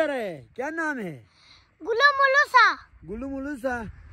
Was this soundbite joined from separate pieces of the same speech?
no; 0 cuts

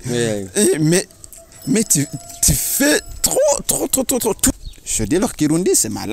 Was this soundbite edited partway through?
yes; 1 cut; at 4.5 s

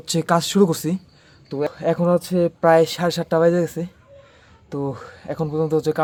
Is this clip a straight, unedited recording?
yes; 0 cuts

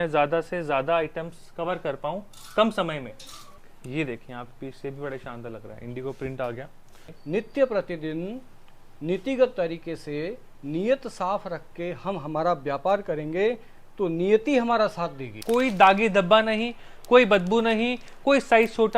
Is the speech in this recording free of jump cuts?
no; 3 cuts; at 3.7 s, 7.2 s, 15.3 s

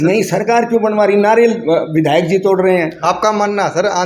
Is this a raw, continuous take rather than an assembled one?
no; 1 cut; at 2.9 s

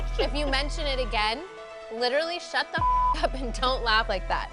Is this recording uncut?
yes; 0 cuts

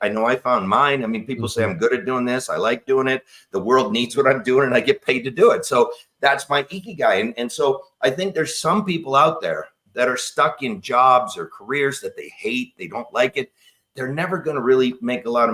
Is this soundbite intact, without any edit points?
yes; 0 cuts

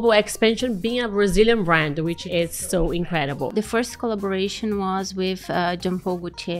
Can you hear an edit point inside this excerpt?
yes; 2 cuts; at 2.2 s, 3.5 s

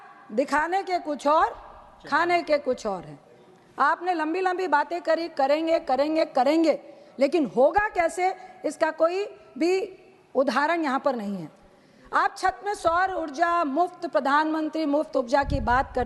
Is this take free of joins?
yes; 0 cuts

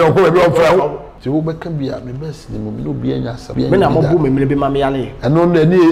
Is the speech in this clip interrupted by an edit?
yes; 2 cuts; at 1.1 s, 3.4 s

